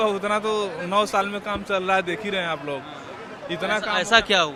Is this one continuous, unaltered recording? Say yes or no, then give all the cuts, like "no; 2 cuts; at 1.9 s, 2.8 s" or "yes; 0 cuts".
yes; 0 cuts